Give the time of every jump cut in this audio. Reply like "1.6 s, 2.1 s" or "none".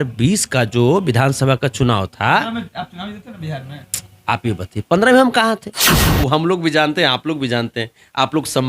6.0 s